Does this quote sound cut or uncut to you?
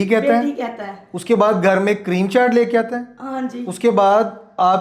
uncut